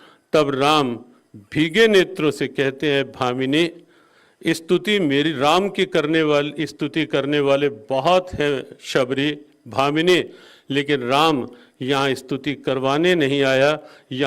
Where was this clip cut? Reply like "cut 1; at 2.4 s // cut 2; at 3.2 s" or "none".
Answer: none